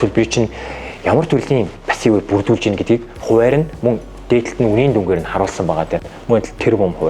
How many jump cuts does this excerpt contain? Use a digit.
0